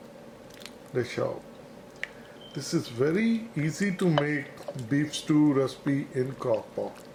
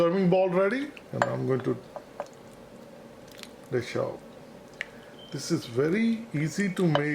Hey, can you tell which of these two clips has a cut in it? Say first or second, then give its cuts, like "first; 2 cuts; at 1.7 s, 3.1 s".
second; 1 cut; at 1.0 s